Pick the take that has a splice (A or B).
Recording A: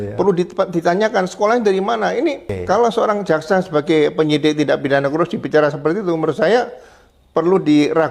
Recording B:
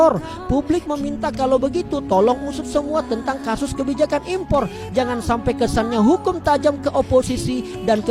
A